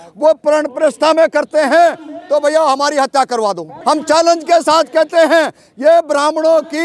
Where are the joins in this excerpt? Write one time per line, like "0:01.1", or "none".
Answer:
0:03.7